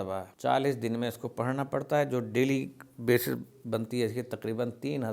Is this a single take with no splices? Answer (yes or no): yes